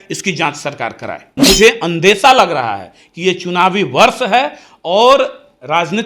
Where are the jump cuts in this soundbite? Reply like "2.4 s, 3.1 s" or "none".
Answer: 1.4 s